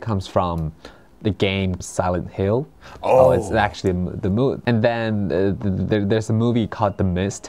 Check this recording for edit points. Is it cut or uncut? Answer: cut